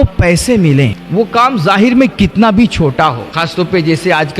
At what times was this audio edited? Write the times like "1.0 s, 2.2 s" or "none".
1.0 s, 3.3 s